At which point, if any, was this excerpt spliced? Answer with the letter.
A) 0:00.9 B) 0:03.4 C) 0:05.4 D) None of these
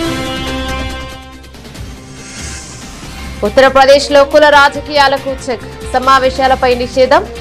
D